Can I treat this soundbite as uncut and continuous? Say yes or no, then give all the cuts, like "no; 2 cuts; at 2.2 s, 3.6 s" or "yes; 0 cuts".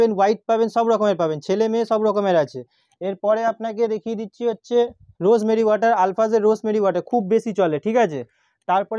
yes; 0 cuts